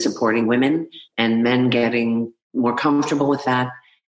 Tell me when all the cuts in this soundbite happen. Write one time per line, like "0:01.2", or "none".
0:02.4